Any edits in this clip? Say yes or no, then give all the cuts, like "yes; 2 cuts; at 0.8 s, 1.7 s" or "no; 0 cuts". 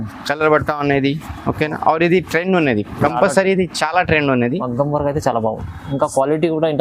no; 0 cuts